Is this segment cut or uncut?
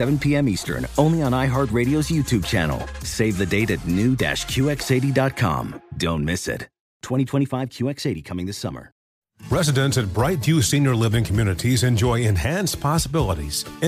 cut